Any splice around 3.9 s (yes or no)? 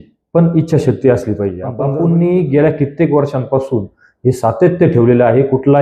no